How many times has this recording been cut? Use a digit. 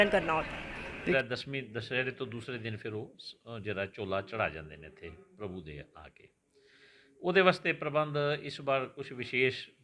1